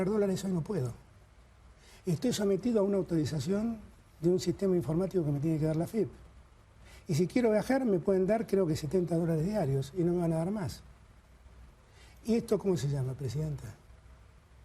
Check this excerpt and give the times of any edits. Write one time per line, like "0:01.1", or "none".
none